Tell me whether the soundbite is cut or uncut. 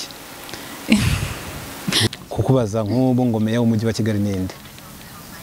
cut